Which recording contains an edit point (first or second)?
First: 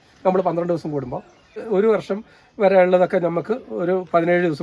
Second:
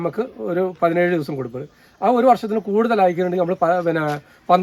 first